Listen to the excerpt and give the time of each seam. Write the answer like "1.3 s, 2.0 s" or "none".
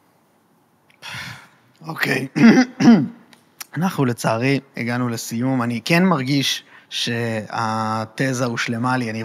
none

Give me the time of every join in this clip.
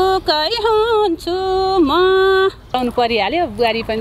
2.8 s

